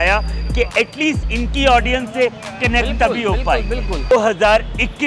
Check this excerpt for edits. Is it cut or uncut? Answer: cut